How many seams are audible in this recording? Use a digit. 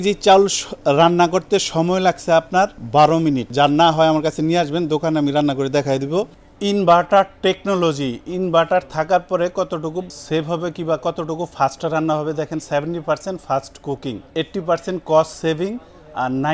4